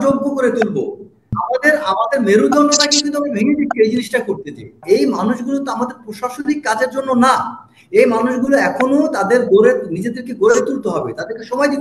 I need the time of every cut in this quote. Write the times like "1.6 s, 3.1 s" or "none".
1.4 s, 4.8 s